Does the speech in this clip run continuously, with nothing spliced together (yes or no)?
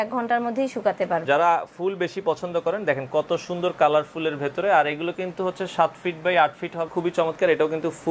no